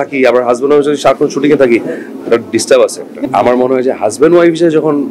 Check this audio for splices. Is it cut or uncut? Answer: cut